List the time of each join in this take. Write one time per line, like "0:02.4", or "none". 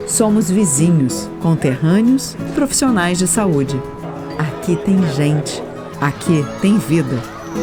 none